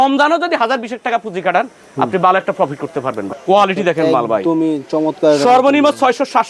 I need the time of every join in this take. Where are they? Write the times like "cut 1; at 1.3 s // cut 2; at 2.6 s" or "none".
cut 1; at 3.3 s